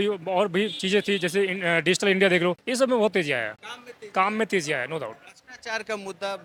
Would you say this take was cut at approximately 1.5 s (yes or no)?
no